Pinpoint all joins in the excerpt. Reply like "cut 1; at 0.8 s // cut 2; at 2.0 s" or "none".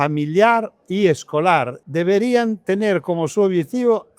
cut 1; at 1.8 s